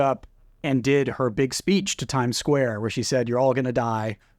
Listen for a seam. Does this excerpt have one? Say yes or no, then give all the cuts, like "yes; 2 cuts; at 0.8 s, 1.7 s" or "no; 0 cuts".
no; 0 cuts